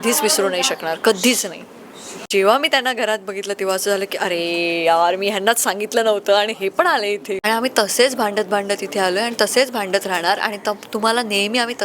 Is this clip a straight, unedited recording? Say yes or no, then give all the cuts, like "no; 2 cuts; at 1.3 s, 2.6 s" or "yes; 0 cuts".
no; 2 cuts; at 2.3 s, 7.4 s